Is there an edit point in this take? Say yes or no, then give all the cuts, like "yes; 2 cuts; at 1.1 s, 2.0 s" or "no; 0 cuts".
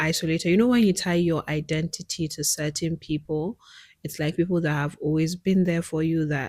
no; 0 cuts